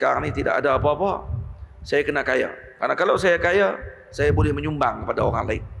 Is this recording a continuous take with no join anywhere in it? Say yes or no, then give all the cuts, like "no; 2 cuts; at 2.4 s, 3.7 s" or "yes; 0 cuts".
yes; 0 cuts